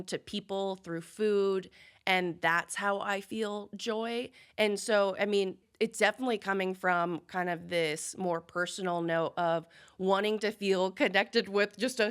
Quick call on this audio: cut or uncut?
cut